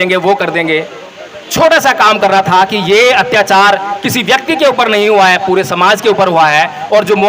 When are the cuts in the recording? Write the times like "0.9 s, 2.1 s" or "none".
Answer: none